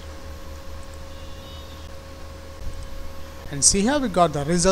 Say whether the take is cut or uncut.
cut